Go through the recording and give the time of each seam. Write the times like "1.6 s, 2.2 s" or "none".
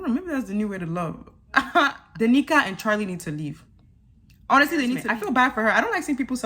2.0 s, 5.0 s

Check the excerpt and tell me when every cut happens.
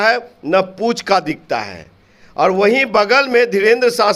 none

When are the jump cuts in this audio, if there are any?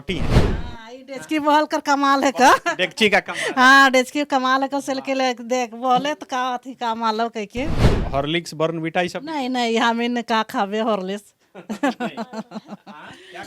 7.9 s

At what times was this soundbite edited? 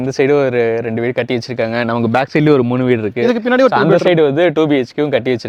none

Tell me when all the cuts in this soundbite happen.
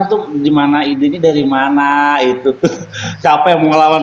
none

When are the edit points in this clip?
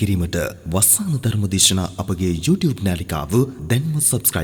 none

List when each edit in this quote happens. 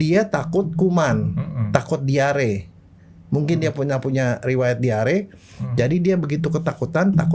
none

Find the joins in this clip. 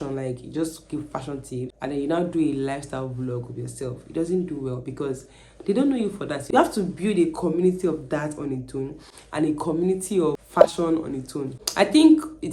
1.7 s, 6.4 s, 10.4 s, 11.5 s

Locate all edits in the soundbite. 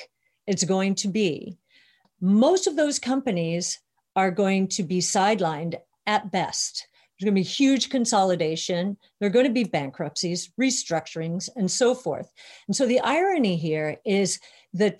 2.0 s

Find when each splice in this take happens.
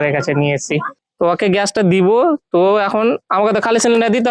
1.0 s

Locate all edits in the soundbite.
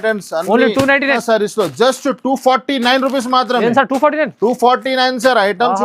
1.2 s

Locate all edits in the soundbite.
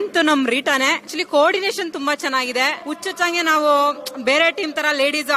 1.1 s, 2.8 s

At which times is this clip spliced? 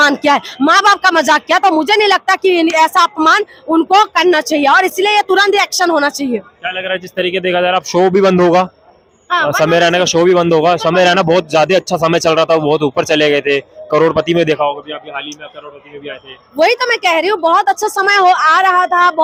none

